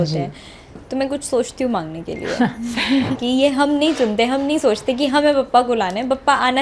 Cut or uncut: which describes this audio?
cut